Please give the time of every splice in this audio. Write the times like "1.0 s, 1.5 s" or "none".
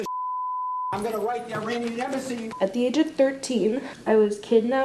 2.5 s, 3.9 s